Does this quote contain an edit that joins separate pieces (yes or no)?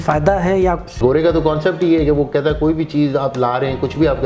yes